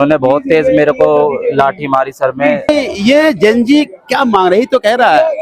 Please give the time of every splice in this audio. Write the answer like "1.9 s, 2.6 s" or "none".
2.7 s